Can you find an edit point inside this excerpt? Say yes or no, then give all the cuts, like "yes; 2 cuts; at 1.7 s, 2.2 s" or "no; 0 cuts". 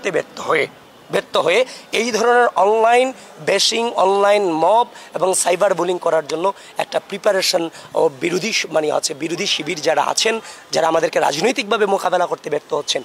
no; 0 cuts